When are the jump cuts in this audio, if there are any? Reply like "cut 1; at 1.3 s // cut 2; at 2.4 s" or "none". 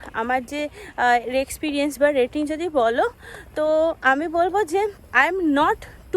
cut 1; at 5.0 s